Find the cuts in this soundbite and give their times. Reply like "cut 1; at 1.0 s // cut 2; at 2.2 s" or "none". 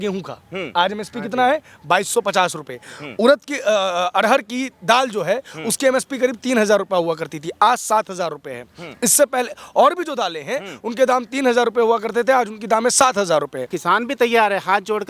cut 1; at 13.7 s